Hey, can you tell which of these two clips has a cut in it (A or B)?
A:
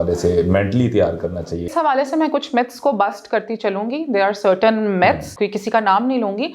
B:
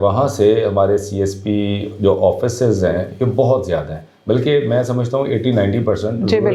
A